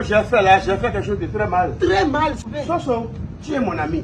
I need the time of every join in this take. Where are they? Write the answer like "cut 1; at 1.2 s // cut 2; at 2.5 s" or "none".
cut 1; at 2.4 s